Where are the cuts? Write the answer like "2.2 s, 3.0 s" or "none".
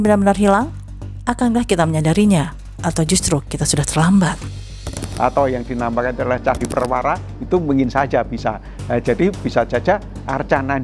5.0 s